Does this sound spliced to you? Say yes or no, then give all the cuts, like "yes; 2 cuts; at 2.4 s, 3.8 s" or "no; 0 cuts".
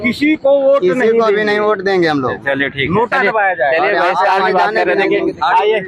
no; 0 cuts